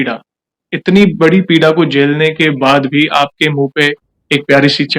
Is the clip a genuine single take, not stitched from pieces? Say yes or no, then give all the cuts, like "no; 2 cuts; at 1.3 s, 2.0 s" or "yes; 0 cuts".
yes; 0 cuts